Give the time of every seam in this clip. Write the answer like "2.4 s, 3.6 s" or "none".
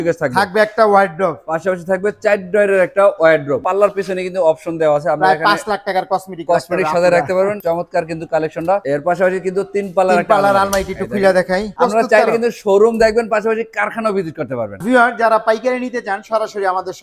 3.6 s, 7.6 s, 8.8 s, 11.7 s, 14.8 s